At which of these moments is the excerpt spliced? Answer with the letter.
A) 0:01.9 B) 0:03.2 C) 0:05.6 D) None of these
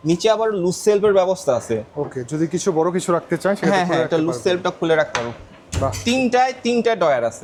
D